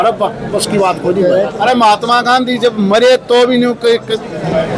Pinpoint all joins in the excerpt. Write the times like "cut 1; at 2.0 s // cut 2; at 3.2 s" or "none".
cut 1; at 1.5 s